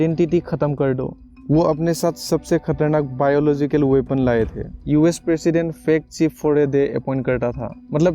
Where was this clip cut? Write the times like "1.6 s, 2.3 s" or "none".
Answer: 1.3 s, 4.7 s